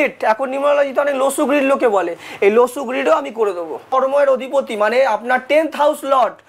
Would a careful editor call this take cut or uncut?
cut